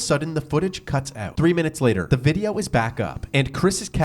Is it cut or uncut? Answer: cut